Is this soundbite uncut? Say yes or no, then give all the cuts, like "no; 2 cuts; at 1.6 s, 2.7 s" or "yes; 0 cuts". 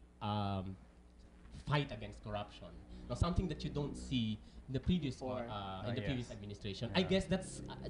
no; 1 cut; at 6.5 s